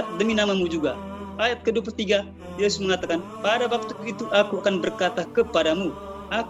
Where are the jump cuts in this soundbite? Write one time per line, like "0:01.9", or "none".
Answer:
none

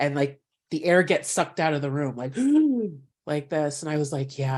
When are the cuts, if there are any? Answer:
none

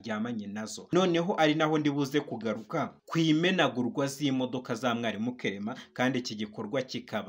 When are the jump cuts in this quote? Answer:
0:00.9
0:03.0

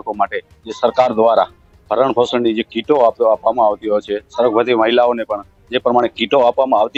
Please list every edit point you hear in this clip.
none

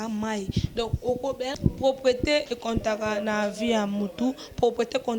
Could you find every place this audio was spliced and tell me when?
0:01.5

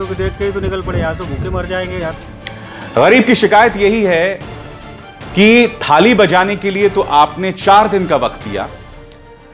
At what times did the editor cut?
0:02.2

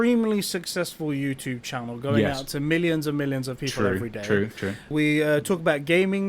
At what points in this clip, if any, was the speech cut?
0:04.9

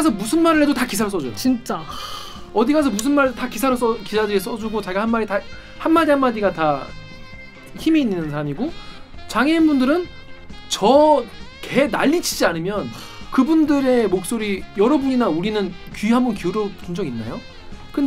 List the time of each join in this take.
none

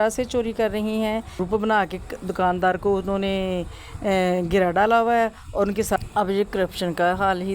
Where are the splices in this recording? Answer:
0:01.4
0:06.0

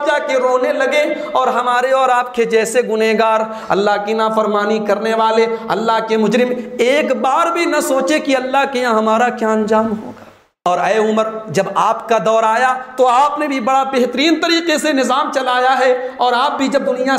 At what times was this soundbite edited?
0:10.5

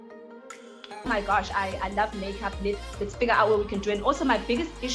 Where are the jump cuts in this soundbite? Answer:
0:01.1

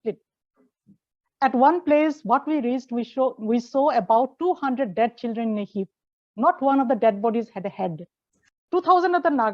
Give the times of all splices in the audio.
0:08.6

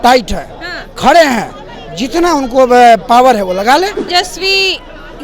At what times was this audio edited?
0:04.1

